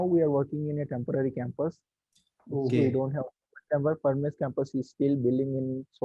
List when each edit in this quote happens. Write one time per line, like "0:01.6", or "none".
none